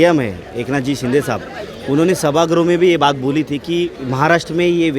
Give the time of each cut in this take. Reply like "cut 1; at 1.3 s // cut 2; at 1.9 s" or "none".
cut 1; at 4.0 s